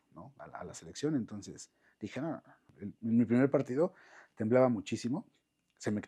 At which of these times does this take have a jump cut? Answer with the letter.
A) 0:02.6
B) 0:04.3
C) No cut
A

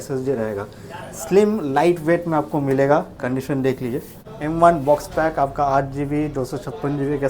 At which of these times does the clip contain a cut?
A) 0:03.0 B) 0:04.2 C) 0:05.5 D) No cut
B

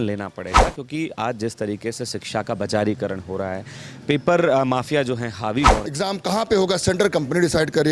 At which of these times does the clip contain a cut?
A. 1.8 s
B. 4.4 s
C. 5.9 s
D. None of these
C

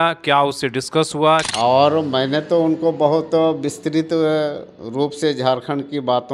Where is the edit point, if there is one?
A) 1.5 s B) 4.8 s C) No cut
A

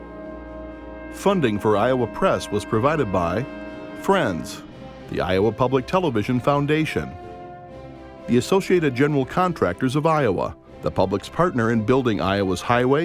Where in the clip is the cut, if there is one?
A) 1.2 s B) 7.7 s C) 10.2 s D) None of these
A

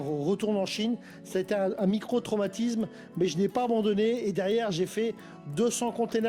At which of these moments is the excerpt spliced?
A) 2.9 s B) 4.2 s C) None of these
C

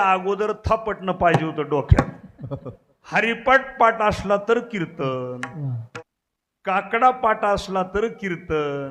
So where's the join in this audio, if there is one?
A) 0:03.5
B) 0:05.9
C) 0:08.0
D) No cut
B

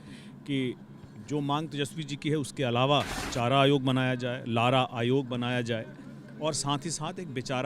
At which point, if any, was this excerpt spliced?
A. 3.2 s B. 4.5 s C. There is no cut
A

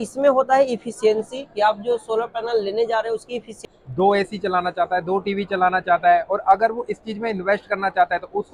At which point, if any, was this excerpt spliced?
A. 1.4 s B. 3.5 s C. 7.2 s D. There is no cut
B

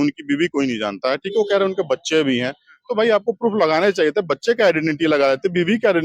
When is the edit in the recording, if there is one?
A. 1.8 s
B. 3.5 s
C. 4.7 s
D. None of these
D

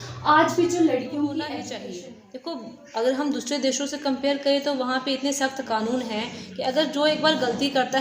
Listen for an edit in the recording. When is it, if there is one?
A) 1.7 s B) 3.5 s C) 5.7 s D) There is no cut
A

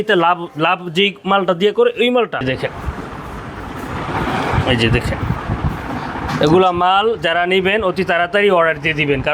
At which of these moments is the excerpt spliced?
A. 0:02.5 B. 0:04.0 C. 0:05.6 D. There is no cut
A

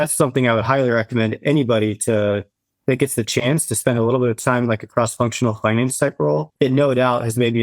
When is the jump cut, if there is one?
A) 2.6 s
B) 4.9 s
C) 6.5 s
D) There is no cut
C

